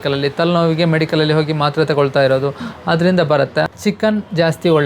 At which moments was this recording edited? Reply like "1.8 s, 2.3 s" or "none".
3.7 s